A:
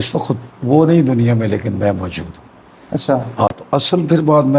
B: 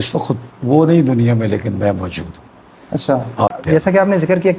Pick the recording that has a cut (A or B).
B